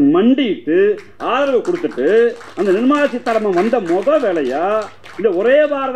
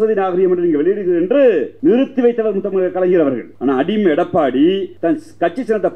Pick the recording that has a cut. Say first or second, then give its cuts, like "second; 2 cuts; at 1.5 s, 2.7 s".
second; 3 cuts; at 1.7 s, 3.5 s, 4.9 s